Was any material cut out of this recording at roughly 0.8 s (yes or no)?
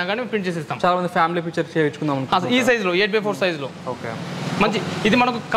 no